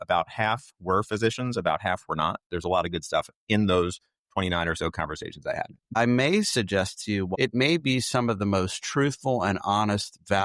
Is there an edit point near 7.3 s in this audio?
yes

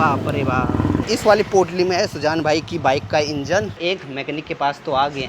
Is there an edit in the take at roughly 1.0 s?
yes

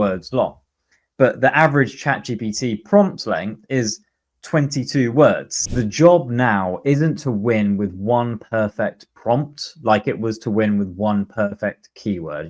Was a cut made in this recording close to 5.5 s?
yes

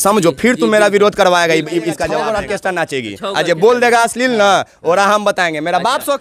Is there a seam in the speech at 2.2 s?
yes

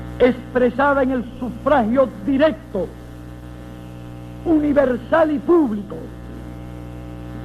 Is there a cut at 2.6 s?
yes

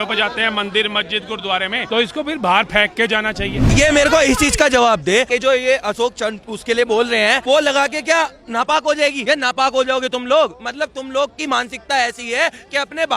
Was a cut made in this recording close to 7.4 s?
yes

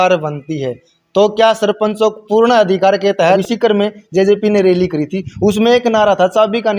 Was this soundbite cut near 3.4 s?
yes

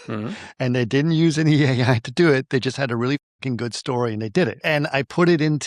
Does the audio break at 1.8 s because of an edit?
no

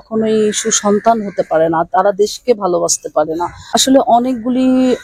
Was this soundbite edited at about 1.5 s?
no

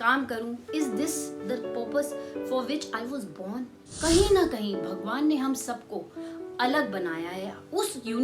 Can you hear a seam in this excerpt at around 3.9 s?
yes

